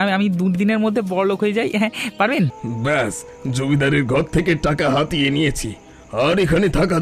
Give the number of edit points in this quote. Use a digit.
1